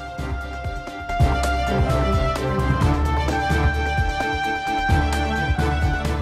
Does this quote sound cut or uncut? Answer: cut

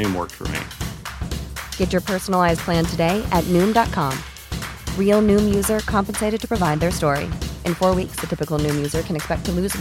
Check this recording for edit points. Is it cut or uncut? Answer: uncut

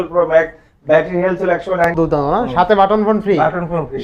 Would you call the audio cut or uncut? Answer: cut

